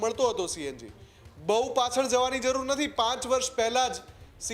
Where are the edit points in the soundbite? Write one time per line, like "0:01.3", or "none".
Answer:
none